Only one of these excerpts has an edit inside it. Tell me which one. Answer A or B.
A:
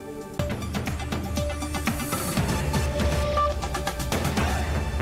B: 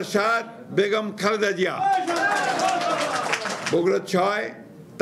B